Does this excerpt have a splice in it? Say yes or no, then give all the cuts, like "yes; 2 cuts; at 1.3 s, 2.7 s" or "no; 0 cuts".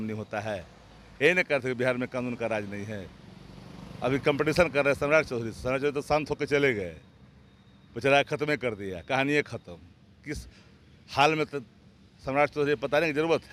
no; 0 cuts